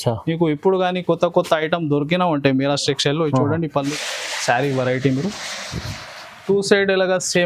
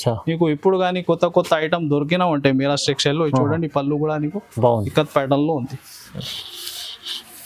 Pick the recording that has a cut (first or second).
first